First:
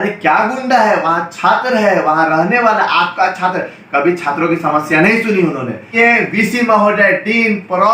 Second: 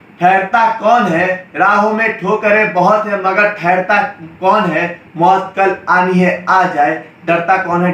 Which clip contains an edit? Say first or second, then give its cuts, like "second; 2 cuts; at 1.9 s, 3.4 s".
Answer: first; 1 cut; at 5.9 s